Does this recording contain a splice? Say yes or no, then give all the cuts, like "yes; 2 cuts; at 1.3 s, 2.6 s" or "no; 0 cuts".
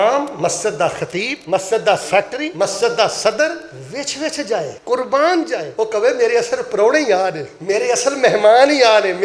yes; 6 cuts; at 1.4 s, 2.4 s, 3.8 s, 4.8 s, 5.6 s, 7.5 s